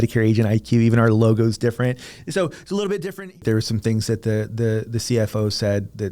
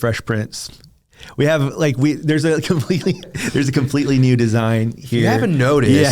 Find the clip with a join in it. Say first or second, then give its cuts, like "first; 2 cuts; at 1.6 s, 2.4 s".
first; 1 cut; at 3.4 s